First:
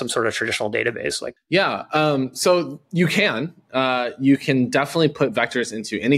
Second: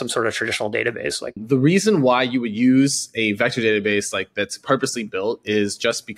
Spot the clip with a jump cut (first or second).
second